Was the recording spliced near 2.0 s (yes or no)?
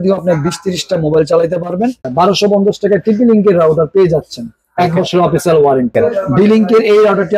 yes